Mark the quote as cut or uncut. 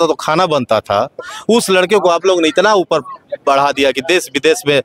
uncut